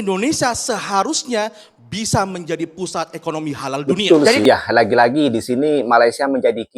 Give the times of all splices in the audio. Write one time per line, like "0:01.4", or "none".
0:04.4